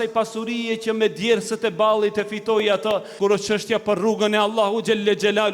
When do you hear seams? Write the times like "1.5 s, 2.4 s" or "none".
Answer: 3.1 s